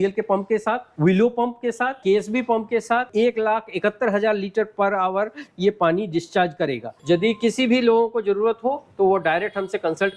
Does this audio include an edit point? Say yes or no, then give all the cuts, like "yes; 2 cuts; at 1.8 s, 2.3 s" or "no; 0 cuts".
yes; 2 cuts; at 3.1 s, 6.9 s